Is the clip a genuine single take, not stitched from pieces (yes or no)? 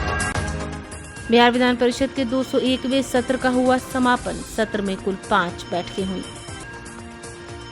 no